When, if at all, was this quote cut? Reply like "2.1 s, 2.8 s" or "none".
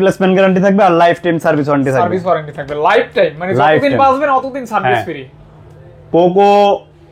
none